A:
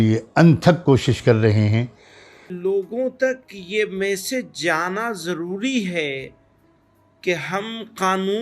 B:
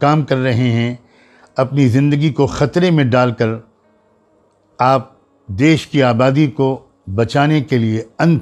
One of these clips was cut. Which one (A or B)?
A